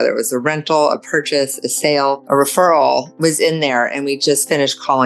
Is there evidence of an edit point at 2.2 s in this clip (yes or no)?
yes